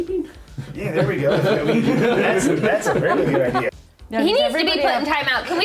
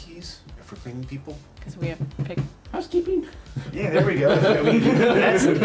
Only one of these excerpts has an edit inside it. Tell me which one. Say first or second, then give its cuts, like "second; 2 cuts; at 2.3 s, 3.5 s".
first; 1 cut; at 3.7 s